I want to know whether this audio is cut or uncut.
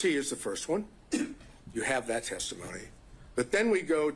uncut